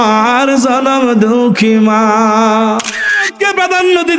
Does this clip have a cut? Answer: yes; 1 cut; at 3.2 s

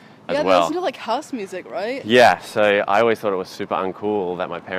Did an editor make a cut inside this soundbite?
no; 0 cuts

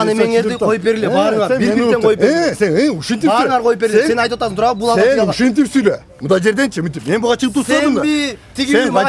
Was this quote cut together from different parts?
no; 0 cuts

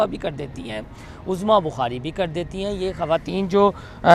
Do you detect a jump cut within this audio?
no; 0 cuts

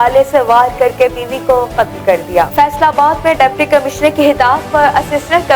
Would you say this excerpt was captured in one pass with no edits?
no; 1 cut; at 2.5 s

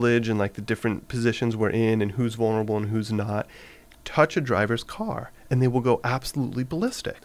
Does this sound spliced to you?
no; 0 cuts

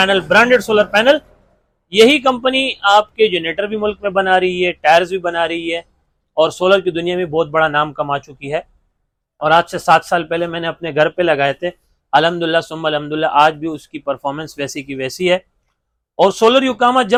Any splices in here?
no; 0 cuts

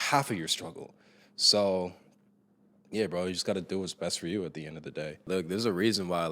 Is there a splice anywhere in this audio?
yes; 1 cut; at 5.3 s

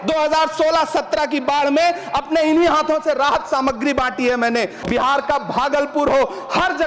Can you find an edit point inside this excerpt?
yes; 1 cut; at 4.8 s

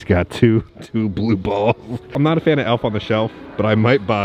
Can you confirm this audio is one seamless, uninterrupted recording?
no; 1 cut; at 2.1 s

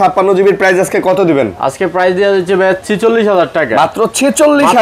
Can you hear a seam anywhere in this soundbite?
no; 0 cuts

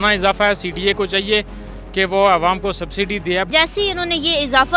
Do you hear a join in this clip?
yes; 1 cut; at 3.5 s

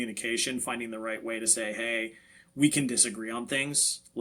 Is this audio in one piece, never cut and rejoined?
yes; 0 cuts

